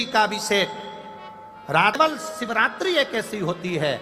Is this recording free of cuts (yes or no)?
no